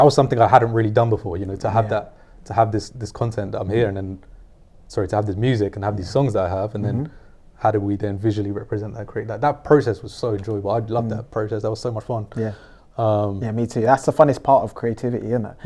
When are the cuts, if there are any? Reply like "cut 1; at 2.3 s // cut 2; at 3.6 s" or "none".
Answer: none